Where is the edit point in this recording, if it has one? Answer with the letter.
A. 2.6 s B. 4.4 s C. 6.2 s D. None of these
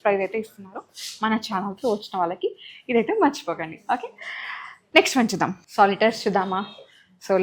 D